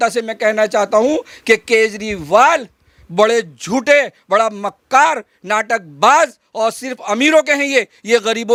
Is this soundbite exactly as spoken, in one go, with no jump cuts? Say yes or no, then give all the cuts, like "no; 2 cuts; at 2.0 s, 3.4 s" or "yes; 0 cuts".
yes; 0 cuts